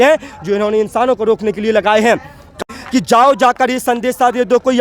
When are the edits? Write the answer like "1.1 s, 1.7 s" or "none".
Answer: 2.6 s